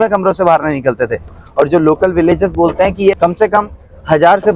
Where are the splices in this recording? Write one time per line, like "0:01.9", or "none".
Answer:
0:01.3
0:03.2